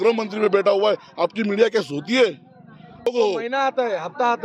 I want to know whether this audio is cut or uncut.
cut